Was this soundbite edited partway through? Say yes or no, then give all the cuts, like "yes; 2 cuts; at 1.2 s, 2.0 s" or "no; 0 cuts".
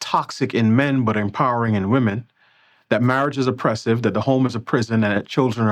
no; 0 cuts